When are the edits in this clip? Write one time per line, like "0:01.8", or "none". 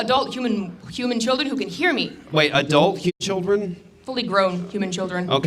0:03.2